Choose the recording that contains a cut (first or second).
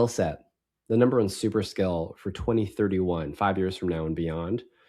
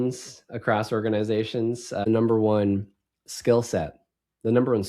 second